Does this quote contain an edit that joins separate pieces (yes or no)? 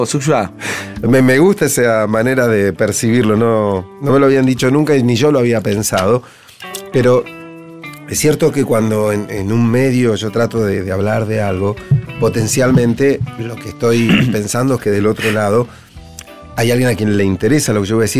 yes